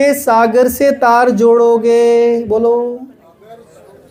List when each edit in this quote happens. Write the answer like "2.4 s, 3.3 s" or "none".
none